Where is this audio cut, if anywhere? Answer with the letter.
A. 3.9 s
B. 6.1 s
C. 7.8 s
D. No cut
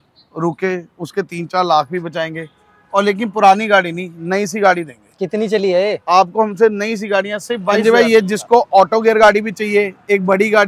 C